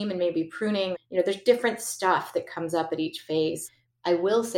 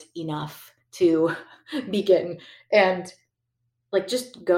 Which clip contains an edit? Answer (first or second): first